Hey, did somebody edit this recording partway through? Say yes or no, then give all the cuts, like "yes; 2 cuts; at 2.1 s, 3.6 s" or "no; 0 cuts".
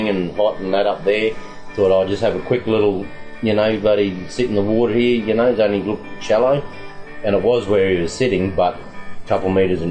no; 0 cuts